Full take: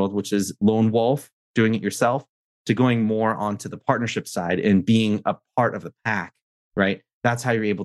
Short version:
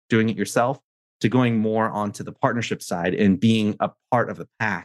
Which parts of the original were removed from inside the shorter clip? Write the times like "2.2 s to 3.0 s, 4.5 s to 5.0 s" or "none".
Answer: none